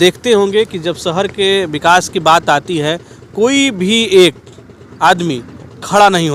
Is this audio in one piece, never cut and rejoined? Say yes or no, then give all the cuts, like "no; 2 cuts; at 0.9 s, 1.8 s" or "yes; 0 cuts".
yes; 0 cuts